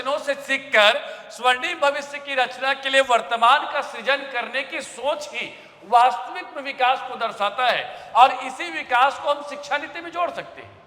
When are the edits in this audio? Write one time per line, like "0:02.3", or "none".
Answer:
none